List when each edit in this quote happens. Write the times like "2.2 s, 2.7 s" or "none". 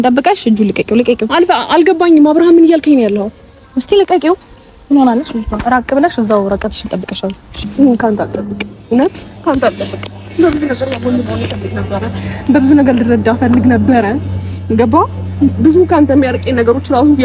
7.6 s